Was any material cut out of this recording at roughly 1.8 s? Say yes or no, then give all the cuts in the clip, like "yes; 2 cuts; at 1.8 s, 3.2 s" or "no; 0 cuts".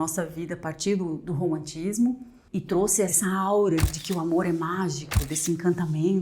no; 2 cuts; at 3.1 s, 3.9 s